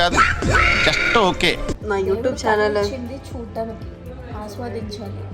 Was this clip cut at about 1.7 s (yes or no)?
yes